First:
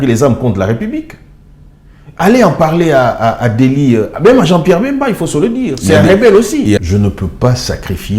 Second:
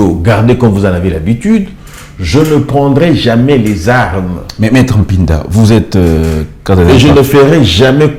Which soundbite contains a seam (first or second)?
first